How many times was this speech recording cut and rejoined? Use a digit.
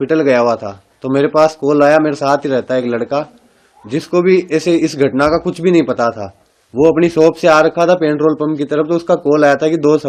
0